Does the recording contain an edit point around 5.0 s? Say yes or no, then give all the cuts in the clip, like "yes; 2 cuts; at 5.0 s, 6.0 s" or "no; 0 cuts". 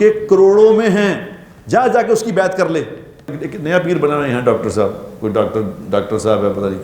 no; 1 cut; at 3.3 s